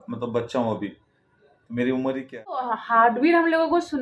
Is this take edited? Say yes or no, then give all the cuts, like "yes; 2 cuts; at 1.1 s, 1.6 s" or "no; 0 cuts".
yes; 1 cut; at 2.8 s